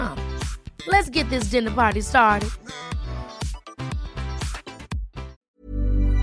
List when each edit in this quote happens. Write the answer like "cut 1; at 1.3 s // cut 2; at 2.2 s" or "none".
cut 1; at 5.3 s